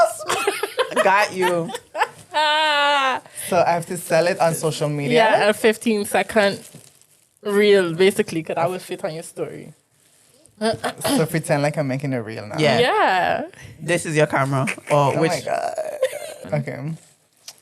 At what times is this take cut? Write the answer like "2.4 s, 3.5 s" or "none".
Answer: 16.4 s